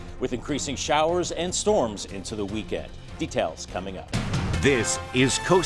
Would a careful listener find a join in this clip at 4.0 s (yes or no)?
yes